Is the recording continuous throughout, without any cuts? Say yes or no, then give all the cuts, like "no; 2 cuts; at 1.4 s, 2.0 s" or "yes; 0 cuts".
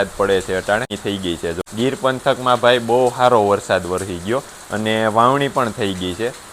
no; 1 cut; at 1.0 s